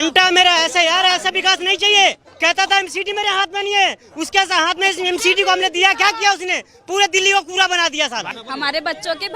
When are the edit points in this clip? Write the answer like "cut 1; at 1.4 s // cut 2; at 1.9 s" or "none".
cut 1; at 2.3 s // cut 2; at 8.4 s